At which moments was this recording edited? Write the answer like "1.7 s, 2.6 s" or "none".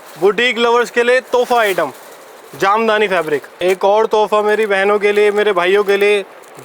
3.5 s

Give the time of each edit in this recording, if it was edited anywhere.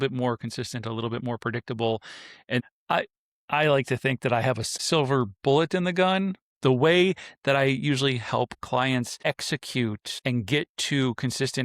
2.6 s, 4.7 s, 6.4 s, 9.2 s, 10.1 s

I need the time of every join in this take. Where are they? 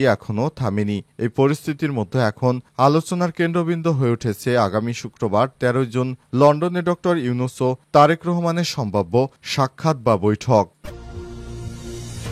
10.7 s

